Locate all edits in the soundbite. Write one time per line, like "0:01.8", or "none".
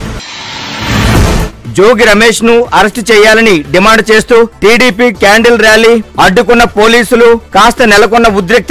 0:01.3